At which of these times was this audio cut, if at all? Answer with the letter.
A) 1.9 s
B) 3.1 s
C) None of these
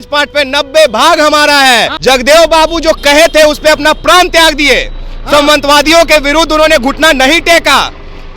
A